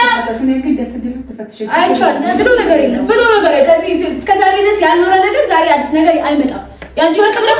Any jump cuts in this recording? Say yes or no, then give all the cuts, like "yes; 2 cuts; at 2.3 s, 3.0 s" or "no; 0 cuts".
no; 0 cuts